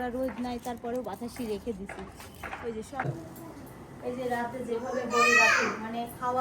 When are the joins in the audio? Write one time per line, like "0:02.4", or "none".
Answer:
0:03.0